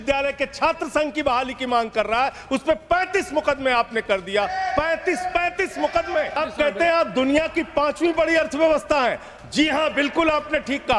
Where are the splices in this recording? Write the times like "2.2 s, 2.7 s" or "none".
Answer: 6.4 s